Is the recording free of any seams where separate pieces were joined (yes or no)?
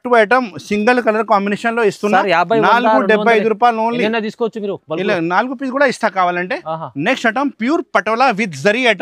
yes